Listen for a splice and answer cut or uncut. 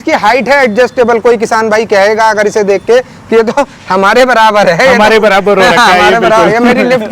uncut